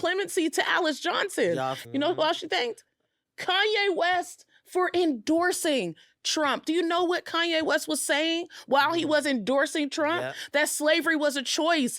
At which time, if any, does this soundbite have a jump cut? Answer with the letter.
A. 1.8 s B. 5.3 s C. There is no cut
A